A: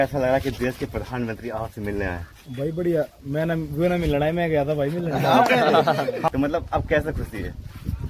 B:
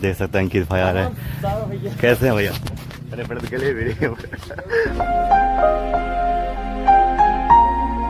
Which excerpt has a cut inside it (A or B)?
A